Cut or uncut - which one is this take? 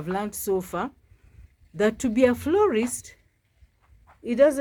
uncut